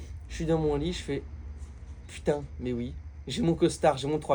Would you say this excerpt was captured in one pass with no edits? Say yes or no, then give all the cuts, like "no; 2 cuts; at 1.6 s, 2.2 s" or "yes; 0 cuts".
yes; 0 cuts